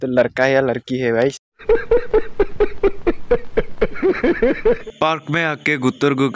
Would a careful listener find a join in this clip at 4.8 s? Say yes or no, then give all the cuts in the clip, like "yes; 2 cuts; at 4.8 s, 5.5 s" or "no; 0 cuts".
yes; 1 cut; at 4.8 s